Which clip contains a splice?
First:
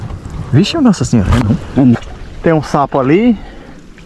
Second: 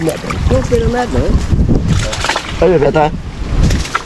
first; 1 cut; at 2.0 s

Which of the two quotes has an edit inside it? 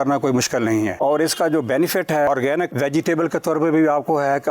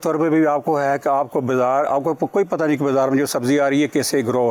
first; 2 cuts; at 0.9 s, 2.3 s

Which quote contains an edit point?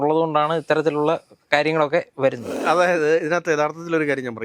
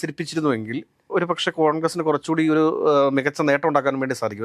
first; 1 cut; at 2.6 s

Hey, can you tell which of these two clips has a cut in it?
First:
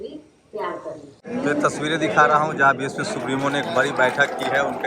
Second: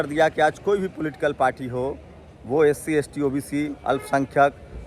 first; 1 cut; at 1.1 s

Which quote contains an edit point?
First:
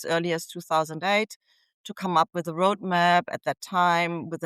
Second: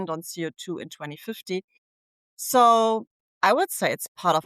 second; 1 cut; at 3.1 s

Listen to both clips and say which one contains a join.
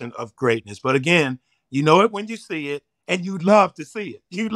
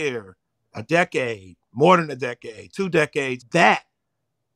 second; 1 cut; at 3.4 s

